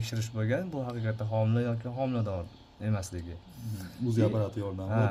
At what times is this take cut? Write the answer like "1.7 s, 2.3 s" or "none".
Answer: none

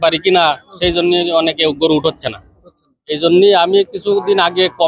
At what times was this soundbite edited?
none

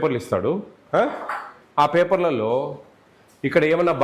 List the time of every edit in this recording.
none

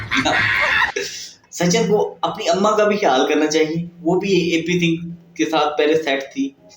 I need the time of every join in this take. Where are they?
1.4 s

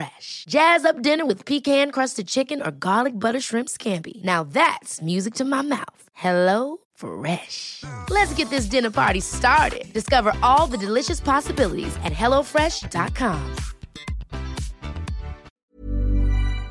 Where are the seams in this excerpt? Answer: 15.5 s

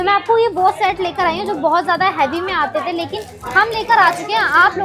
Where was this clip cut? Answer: none

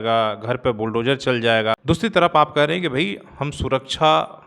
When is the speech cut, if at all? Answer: 1.8 s

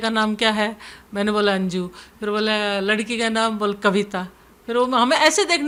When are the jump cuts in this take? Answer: none

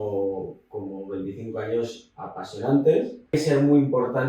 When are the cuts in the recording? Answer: 3.3 s

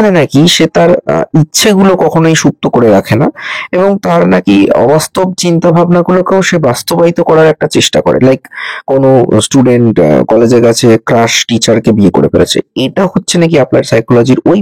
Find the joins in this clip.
none

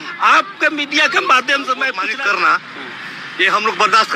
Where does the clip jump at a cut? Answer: 2.0 s

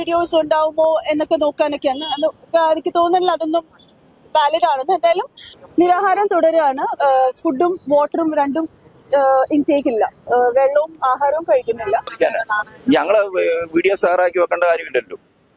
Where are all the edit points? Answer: 5.4 s, 12.1 s

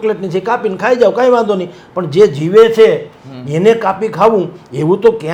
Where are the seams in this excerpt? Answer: none

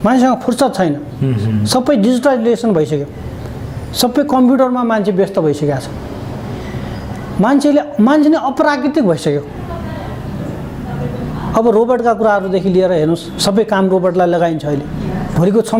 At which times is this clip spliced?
none

